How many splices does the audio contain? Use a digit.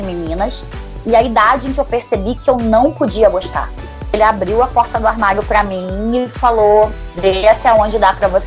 1